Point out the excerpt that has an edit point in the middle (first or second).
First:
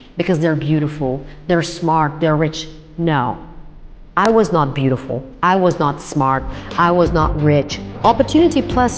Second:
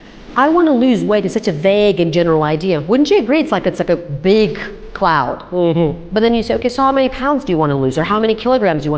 first